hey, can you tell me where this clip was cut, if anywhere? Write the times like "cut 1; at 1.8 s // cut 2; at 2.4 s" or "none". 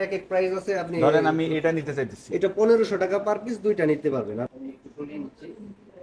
cut 1; at 4.4 s